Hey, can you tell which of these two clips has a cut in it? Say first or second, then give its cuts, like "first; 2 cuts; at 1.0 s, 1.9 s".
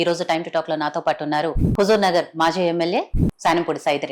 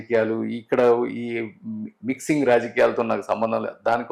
first; 2 cuts; at 1.6 s, 3.2 s